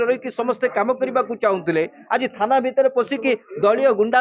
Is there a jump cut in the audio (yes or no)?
no